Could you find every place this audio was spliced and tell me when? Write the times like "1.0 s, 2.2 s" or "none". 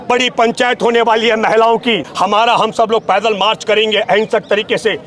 2.1 s